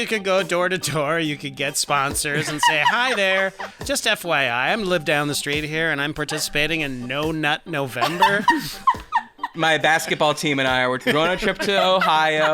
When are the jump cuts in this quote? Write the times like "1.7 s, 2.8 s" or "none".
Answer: 3.8 s, 9.5 s, 11.0 s